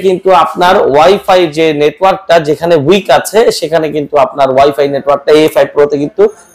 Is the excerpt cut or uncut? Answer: uncut